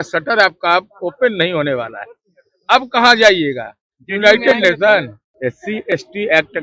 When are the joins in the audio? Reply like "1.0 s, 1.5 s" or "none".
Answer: 5.2 s